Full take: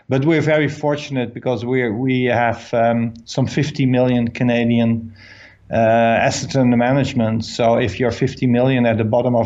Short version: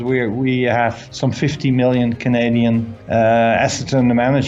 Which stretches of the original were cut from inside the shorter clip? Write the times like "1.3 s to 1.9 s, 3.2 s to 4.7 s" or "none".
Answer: 2.6 s to 3.2 s, 5.1 s to 5.6 s